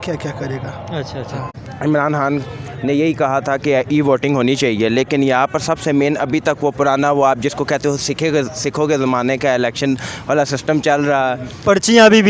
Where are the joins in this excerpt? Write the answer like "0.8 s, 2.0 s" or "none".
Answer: 1.4 s